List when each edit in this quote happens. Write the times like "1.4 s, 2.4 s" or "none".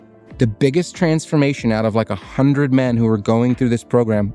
none